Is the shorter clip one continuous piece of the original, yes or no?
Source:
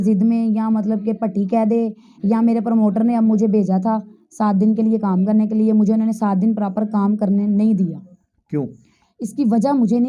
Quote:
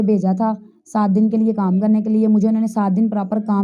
yes